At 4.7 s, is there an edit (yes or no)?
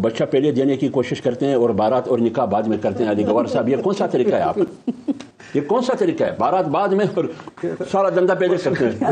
no